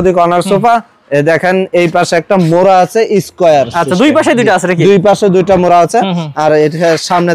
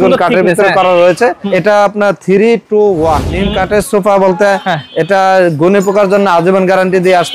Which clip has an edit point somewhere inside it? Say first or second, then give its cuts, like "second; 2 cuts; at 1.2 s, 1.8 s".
second; 2 cuts; at 1.5 s, 3.3 s